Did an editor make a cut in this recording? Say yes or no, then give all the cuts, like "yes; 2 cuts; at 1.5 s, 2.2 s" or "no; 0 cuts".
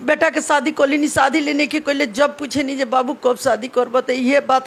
no; 0 cuts